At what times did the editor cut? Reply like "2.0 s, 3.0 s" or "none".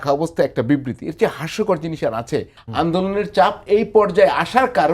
2.6 s